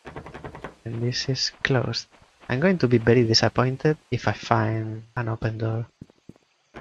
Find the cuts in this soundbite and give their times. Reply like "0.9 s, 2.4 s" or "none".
4.0 s, 5.0 s